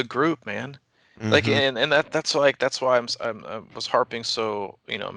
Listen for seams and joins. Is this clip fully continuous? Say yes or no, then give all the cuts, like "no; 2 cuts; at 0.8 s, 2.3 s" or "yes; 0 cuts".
yes; 0 cuts